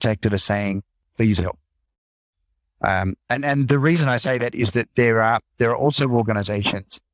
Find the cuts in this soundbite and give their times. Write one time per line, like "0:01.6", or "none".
none